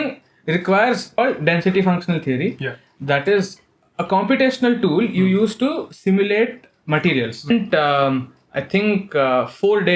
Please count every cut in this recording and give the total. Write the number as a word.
two